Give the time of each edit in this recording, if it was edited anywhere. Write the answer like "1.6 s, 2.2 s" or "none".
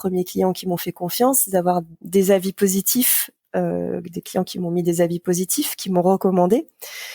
1.9 s